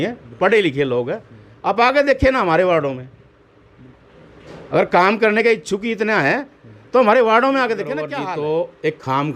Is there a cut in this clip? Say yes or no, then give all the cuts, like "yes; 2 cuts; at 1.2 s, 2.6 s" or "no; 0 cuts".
yes; 1 cut; at 8.1 s